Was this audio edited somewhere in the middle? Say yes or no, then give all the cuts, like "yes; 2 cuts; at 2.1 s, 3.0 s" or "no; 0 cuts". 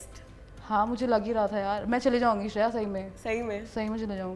no; 0 cuts